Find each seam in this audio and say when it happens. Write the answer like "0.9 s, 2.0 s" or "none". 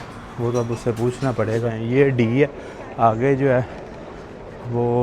1.8 s